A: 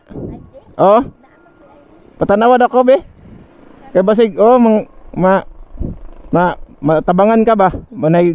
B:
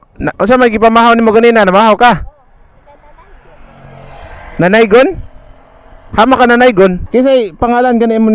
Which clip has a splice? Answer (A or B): B